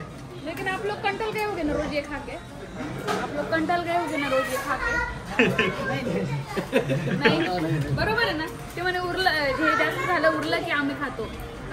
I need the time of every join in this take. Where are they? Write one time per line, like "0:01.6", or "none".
none